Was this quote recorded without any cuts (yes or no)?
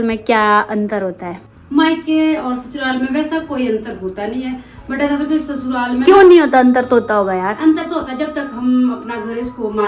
yes